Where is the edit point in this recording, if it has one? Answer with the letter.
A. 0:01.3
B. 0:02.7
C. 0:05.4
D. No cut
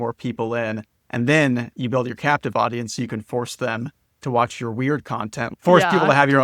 C